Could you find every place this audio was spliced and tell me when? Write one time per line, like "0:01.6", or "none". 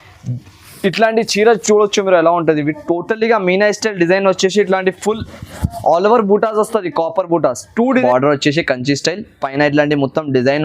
0:08.0